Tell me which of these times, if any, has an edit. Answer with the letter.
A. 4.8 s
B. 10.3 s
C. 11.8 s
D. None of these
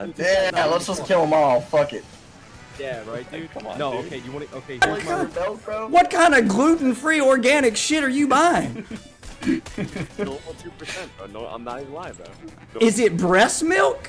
A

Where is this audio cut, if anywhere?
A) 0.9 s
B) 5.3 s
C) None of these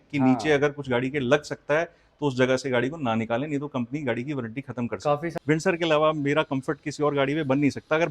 B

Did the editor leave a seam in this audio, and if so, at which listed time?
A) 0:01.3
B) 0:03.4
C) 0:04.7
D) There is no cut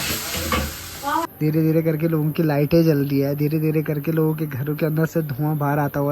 A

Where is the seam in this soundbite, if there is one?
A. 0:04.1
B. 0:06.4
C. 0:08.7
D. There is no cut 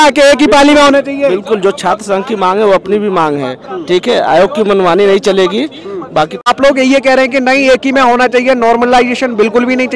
B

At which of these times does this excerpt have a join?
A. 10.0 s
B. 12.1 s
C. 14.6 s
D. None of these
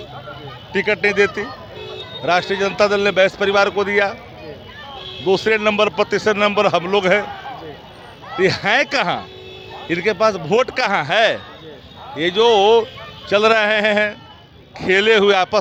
D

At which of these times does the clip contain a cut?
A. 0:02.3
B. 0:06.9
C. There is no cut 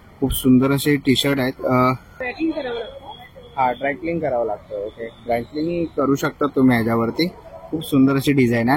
A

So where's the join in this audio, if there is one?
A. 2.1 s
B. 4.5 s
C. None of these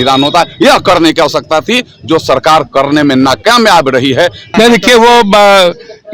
B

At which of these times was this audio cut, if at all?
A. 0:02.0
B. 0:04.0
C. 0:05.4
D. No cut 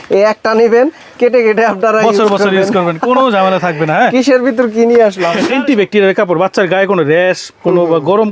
C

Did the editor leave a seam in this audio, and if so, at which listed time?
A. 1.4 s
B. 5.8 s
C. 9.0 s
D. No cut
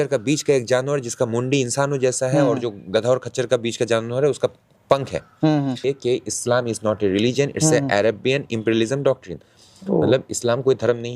B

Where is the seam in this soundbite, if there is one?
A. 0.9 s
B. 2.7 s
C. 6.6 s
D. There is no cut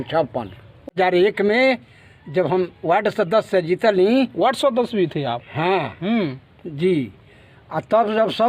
A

